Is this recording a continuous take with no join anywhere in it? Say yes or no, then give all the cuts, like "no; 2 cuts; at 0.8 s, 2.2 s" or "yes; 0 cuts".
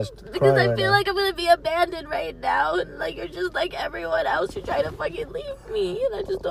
yes; 0 cuts